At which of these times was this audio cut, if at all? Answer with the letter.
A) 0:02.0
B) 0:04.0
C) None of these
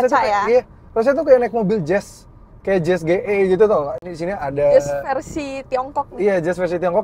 C